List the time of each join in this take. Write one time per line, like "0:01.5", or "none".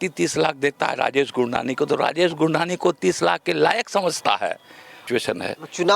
0:05.0

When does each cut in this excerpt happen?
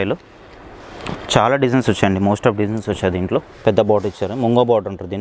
0:03.5

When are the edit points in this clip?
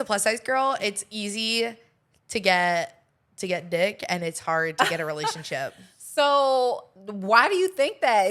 none

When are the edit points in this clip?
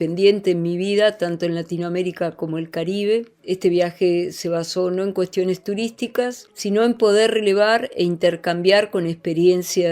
0:03.4
0:06.5

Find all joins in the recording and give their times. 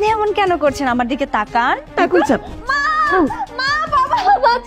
0:01.9

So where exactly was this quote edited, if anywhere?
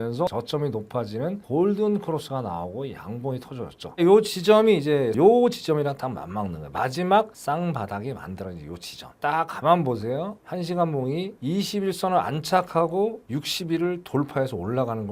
none

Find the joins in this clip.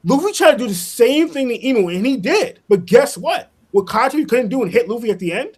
none

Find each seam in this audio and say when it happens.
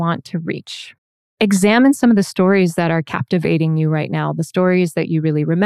0:01.2

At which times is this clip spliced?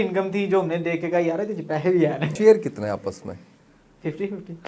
0:02.3

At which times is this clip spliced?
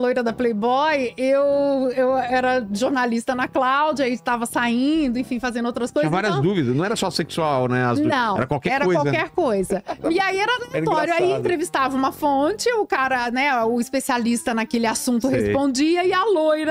none

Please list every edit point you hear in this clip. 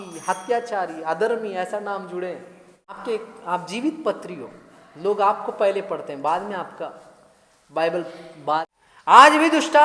0:03.0
0:08.6

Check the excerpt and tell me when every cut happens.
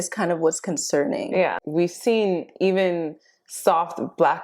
0:01.6

